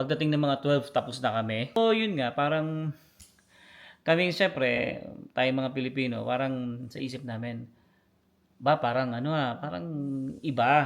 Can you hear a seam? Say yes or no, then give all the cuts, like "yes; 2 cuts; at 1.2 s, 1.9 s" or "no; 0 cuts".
yes; 1 cut; at 1.8 s